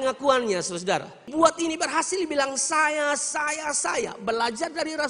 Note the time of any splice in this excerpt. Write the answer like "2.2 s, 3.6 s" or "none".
1.3 s